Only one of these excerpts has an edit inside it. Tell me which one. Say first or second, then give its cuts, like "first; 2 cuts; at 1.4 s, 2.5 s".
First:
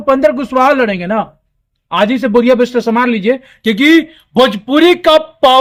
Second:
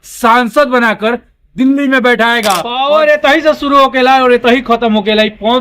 second; 1 cut; at 2.7 s